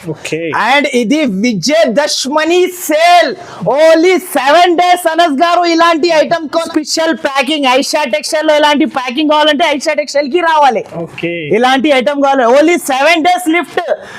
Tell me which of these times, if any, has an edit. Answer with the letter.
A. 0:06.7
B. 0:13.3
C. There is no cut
A